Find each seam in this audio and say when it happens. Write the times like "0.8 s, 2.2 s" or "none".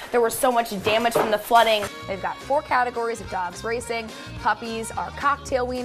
1.9 s